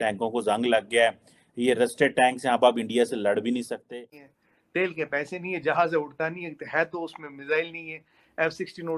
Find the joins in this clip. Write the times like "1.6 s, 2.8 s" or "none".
3.8 s